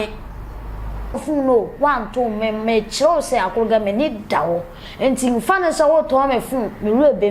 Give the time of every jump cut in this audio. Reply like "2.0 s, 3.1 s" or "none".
1.2 s